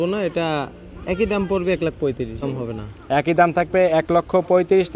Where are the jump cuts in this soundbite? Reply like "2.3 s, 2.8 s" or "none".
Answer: 2.4 s